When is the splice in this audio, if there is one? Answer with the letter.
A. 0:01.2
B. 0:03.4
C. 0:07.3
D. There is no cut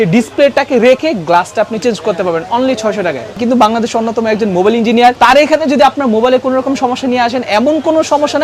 B